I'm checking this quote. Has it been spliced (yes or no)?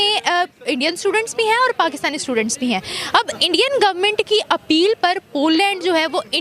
no